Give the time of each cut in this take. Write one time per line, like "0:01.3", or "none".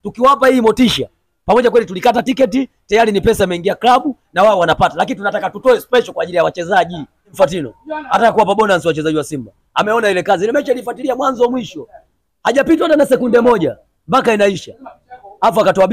0:07.3